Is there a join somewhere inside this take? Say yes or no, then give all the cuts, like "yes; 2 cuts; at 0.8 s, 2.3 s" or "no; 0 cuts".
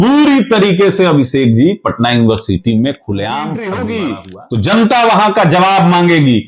yes; 1 cut; at 3.6 s